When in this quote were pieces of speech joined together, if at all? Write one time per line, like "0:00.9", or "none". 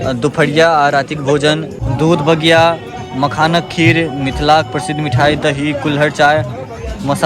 0:01.8

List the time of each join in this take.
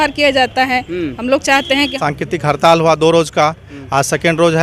0:02.0

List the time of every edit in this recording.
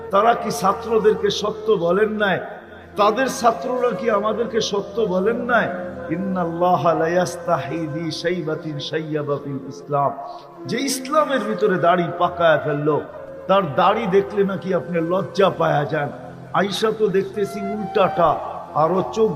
none

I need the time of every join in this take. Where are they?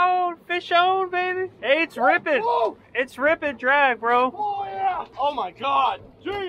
0:01.5
0:05.1

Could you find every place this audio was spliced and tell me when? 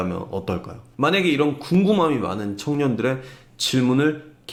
none

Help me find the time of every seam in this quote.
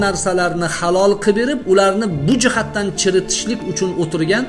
none

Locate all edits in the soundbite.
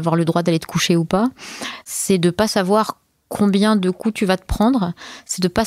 0:01.7

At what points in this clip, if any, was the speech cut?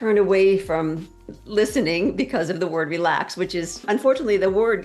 0:03.9

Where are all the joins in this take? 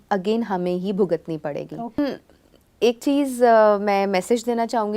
0:02.0

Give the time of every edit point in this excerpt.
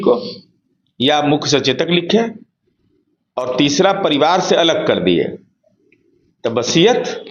none

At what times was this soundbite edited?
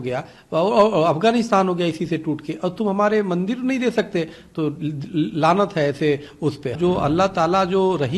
0:06.8

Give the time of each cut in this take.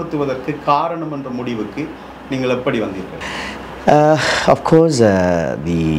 none

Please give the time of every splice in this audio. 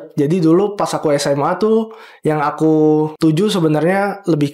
0:03.1

